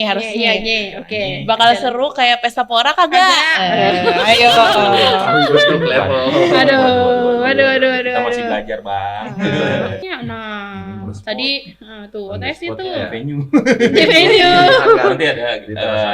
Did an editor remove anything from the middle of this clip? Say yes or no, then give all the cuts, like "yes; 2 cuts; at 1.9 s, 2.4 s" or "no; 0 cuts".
yes; 1 cut; at 10.0 s